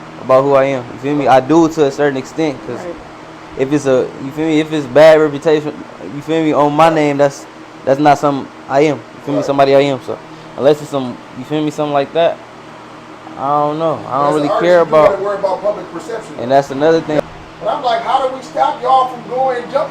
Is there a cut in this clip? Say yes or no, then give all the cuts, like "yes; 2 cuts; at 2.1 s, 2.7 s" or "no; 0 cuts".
yes; 1 cut; at 17.2 s